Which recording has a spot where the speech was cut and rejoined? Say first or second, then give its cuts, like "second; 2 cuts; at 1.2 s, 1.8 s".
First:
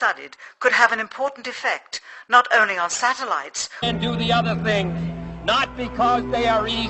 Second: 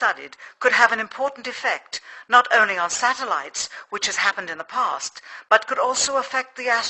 second; 1 cut; at 3.7 s